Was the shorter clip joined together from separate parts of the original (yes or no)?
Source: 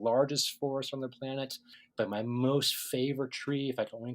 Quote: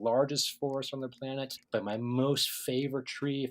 yes